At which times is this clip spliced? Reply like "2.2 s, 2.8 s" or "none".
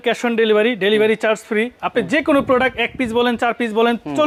none

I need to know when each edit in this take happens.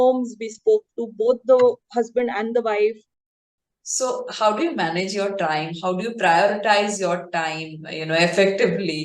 3.4 s

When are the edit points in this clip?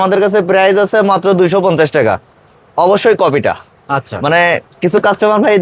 none

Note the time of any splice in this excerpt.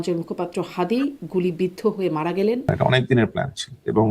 2.7 s

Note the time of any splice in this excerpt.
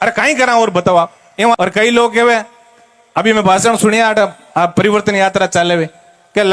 1.6 s

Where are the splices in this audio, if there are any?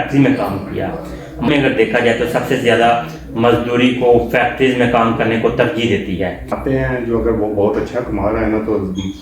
1.5 s, 6.5 s

